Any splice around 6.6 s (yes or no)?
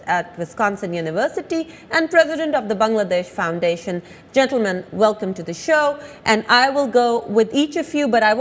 no